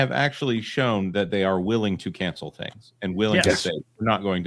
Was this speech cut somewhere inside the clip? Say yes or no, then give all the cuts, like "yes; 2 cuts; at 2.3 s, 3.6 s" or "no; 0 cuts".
no; 0 cuts